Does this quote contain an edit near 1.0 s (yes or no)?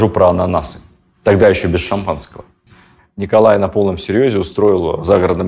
no